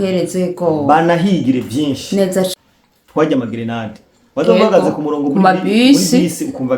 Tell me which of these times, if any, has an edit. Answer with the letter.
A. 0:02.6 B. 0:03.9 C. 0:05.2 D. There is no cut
A